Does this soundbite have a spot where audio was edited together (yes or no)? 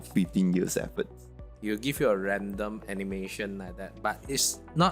yes